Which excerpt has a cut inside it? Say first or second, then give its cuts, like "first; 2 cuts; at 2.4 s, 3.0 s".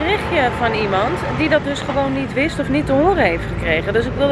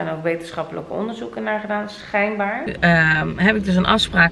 second; 1 cut; at 2.7 s